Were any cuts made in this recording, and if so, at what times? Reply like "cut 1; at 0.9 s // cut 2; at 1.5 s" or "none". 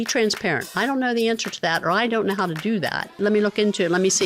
cut 1; at 3.2 s